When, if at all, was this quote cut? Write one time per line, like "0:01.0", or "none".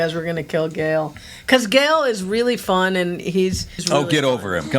0:03.8